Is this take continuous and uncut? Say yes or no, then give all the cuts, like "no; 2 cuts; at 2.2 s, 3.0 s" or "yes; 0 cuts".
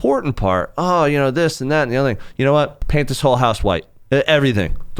no; 1 cut; at 2.8 s